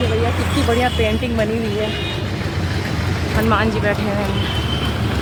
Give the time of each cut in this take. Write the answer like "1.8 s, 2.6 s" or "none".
none

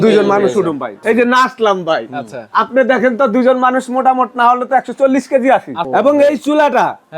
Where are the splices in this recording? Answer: 1.0 s, 5.8 s

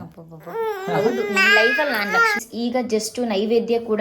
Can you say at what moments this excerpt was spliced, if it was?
2.4 s

